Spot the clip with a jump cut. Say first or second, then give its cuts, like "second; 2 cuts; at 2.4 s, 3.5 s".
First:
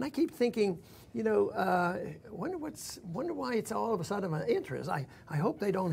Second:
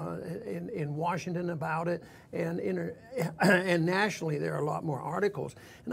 second; 1 cut; at 3.3 s